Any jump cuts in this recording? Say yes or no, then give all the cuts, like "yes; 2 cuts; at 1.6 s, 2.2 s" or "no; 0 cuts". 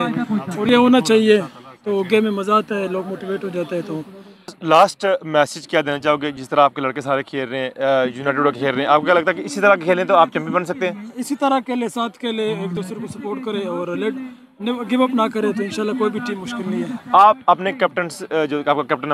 no; 0 cuts